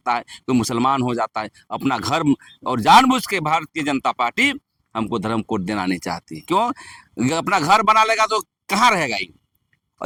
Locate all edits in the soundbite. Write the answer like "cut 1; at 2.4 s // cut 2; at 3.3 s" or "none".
none